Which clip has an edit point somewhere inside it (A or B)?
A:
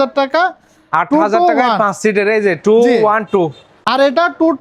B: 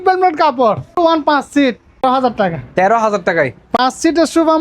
B